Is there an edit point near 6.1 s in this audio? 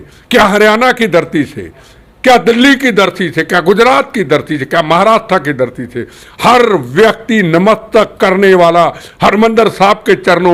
no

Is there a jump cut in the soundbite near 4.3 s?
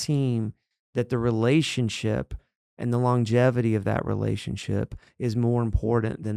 no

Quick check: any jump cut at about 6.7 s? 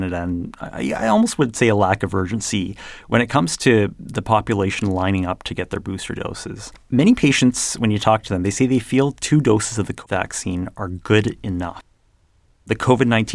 yes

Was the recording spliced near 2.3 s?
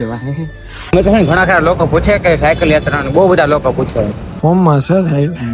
no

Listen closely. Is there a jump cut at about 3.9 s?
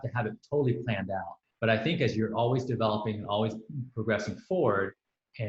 no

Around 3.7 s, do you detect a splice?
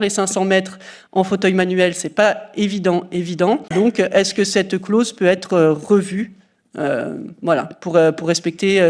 yes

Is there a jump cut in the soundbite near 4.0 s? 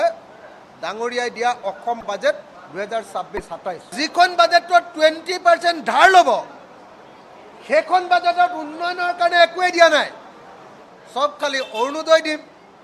yes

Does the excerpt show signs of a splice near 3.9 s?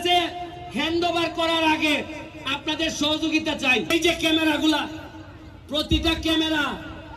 yes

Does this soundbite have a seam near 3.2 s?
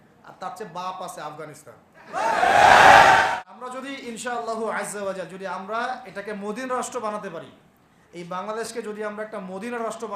yes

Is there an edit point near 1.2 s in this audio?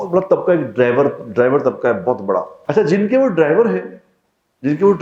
no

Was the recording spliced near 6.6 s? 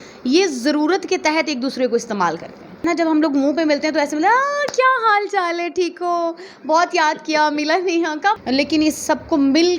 no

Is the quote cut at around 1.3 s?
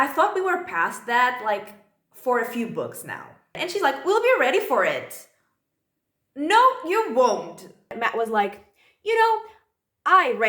no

